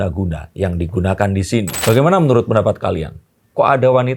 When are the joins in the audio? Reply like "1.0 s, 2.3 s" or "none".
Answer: 1.7 s